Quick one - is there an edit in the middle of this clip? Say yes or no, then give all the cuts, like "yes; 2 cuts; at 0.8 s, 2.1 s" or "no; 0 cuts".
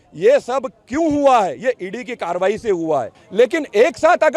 yes; 1 cut; at 3.2 s